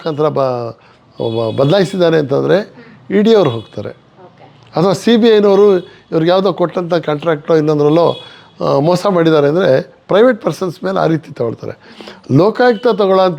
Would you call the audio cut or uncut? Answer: uncut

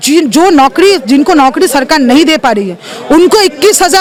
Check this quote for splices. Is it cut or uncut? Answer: uncut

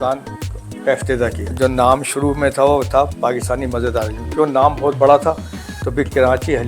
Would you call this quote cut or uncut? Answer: cut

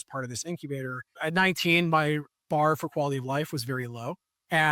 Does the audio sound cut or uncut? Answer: cut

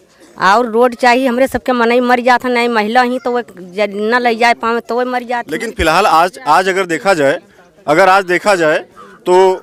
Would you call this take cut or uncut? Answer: uncut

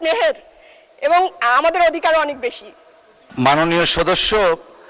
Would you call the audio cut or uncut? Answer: cut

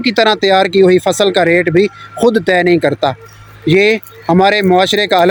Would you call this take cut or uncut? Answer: uncut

